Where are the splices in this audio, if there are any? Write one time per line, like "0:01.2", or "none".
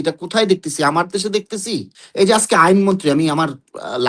0:02.0